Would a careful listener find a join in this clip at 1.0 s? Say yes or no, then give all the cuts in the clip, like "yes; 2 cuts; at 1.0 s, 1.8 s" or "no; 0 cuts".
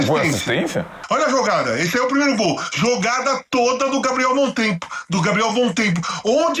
yes; 1 cut; at 1.0 s